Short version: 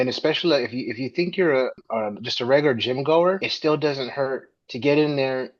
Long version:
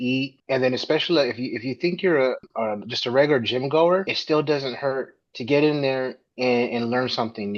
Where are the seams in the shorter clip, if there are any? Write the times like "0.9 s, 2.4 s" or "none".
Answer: none

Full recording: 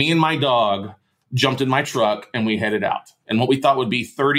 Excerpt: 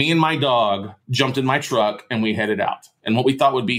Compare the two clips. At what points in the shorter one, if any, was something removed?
1.0 s

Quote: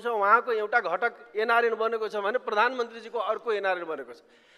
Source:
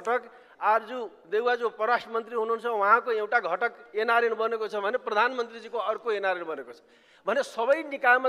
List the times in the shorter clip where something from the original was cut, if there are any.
none

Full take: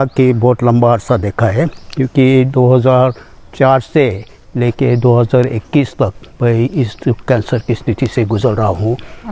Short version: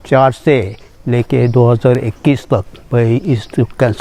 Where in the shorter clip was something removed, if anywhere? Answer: none

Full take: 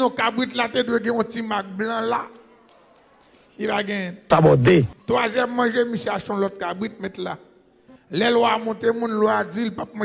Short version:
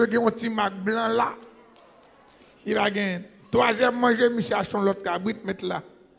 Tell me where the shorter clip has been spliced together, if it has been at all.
3.3 s

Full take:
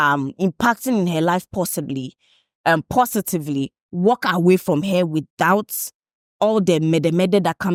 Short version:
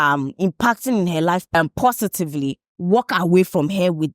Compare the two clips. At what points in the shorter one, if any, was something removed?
1.5 s

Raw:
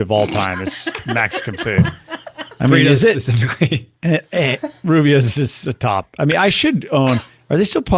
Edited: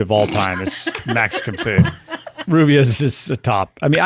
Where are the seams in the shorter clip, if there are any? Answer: 2.3 s

